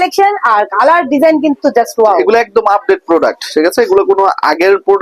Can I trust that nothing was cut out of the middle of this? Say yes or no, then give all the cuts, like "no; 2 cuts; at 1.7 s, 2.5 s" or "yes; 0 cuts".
yes; 0 cuts